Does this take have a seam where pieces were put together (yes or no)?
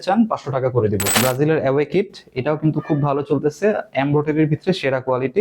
yes